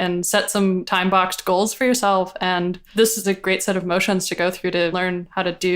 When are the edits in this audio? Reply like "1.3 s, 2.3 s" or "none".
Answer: 0.8 s, 3.2 s, 5.0 s